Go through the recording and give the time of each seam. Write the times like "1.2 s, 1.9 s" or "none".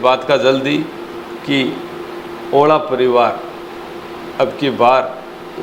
none